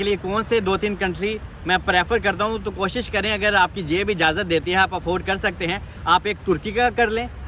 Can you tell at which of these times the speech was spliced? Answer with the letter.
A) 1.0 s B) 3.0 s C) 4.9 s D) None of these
D